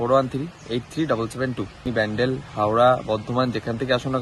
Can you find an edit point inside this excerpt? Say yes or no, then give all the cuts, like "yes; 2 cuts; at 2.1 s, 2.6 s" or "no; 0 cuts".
yes; 1 cut; at 1.9 s